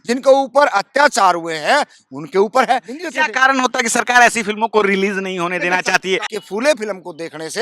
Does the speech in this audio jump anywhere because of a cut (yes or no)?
yes